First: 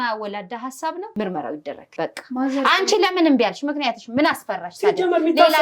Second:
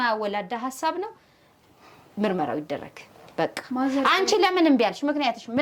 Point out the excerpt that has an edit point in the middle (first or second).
first